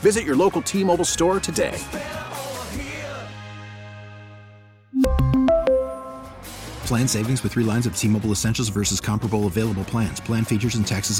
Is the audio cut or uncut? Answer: uncut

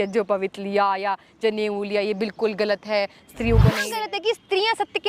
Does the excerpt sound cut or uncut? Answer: cut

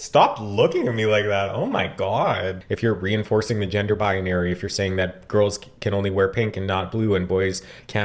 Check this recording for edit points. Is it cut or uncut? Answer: cut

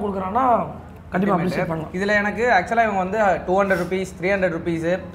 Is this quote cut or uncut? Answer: uncut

